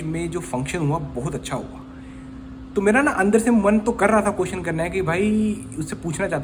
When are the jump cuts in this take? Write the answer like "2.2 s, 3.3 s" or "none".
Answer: none